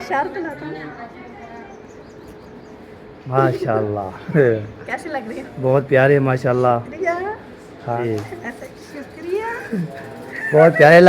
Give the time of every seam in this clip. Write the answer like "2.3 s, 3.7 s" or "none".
3.2 s, 8.0 s

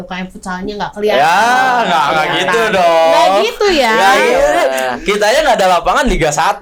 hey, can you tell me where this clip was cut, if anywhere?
none

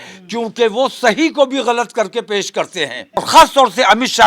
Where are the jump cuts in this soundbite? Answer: 3.1 s

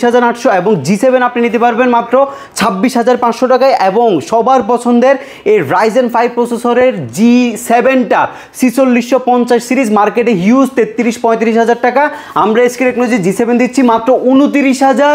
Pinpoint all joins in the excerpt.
none

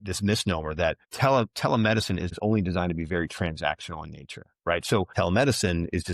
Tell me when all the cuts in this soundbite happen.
1.1 s, 2.3 s, 5.1 s

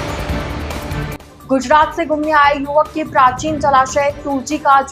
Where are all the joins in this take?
1.1 s

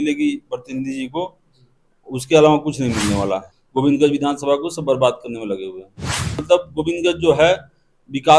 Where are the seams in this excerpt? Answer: 3.6 s, 6.3 s

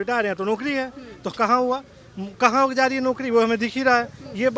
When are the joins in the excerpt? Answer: none

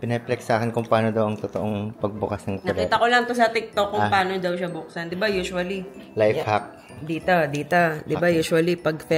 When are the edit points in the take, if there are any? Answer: none

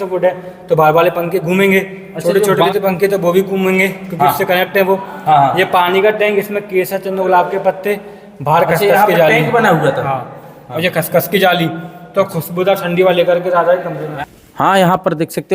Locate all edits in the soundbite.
2.7 s, 14.2 s

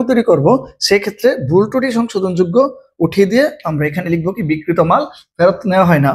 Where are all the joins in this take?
none

